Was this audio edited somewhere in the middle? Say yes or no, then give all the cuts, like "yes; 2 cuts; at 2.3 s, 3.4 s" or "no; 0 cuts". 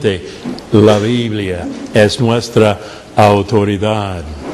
yes; 1 cut; at 3.4 s